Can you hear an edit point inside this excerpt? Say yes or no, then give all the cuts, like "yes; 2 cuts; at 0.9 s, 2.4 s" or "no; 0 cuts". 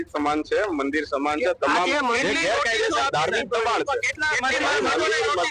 no; 0 cuts